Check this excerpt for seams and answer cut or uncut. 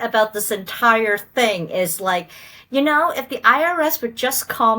uncut